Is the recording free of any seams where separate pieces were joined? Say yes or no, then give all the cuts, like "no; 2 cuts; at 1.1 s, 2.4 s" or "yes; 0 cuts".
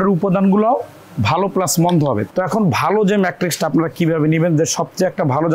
no; 1 cut; at 2.2 s